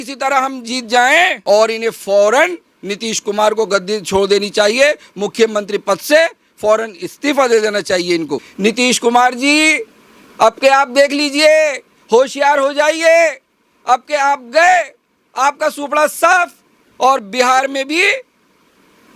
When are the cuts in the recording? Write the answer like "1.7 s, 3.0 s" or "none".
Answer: 1.4 s, 8.4 s